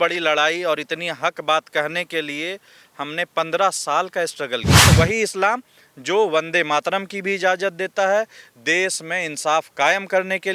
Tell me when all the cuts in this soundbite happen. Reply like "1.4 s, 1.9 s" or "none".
4.9 s